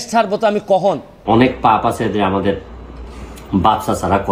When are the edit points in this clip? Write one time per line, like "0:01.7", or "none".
0:01.1